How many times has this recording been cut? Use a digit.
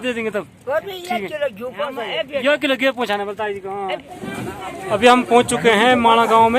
1